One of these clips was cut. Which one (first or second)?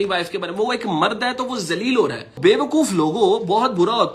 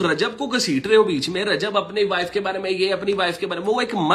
first